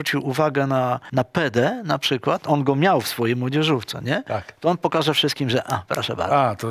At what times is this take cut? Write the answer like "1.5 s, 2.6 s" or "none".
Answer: 1.0 s